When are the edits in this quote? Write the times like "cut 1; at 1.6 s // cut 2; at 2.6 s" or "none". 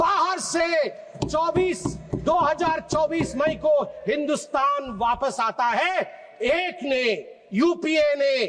none